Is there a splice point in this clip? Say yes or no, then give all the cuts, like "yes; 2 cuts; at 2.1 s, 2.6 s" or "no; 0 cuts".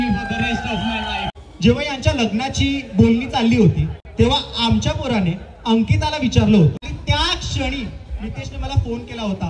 yes; 2 cuts; at 1.2 s, 6.9 s